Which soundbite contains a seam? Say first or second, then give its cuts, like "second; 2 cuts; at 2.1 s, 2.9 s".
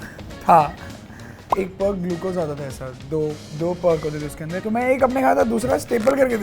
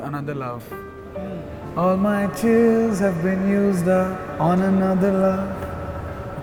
first; 2 cuts; at 1.5 s, 4.5 s